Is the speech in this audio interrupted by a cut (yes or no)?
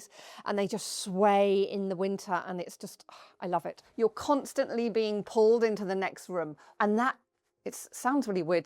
yes